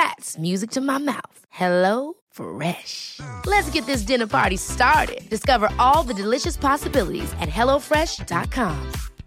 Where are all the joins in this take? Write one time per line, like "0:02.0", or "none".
none